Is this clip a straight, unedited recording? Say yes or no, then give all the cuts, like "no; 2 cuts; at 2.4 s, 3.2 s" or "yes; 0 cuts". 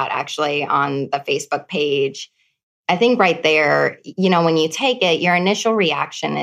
no; 1 cut; at 4.0 s